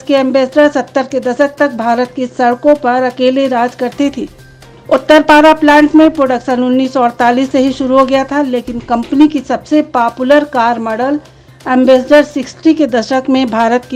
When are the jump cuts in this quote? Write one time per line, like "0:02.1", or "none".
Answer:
none